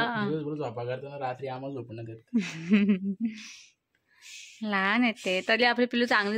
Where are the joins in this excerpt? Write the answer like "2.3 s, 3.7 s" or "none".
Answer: none